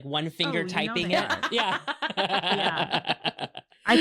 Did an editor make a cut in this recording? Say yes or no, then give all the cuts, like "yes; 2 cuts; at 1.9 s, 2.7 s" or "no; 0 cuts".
no; 0 cuts